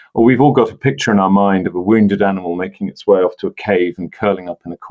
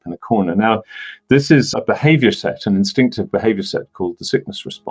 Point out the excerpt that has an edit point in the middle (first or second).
second